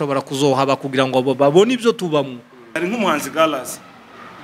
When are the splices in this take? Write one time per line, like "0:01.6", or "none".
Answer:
0:02.7